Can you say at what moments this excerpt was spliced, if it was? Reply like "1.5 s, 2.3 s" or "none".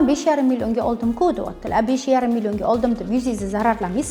none